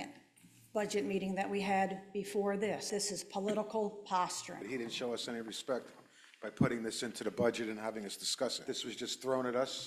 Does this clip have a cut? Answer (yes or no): yes